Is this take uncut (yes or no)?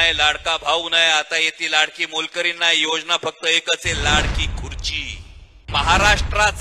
no